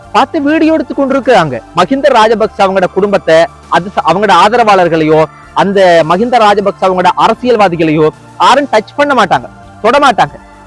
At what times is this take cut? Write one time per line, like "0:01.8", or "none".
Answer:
0:01.6